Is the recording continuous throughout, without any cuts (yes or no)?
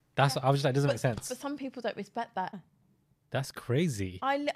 no